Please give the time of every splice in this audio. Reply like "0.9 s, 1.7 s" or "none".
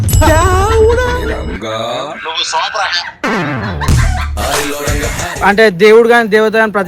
5.4 s